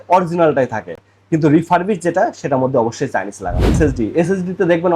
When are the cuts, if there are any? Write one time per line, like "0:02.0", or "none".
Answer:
0:03.8